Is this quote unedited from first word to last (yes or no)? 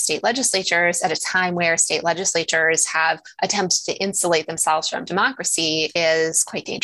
yes